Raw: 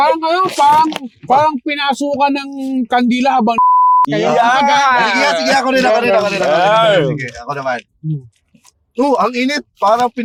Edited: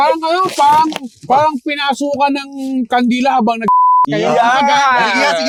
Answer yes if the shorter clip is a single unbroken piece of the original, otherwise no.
yes